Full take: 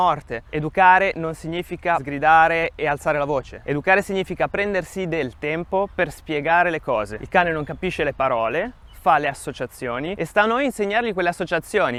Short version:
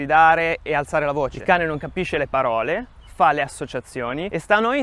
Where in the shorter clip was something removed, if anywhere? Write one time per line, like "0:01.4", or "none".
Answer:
0:01.4